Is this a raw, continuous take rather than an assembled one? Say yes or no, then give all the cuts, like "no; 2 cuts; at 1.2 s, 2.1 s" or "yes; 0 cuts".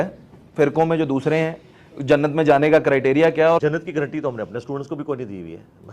no; 1 cut; at 3.6 s